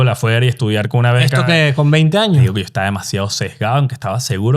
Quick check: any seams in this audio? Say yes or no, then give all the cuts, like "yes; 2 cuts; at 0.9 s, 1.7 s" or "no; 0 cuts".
yes; 1 cut; at 2.5 s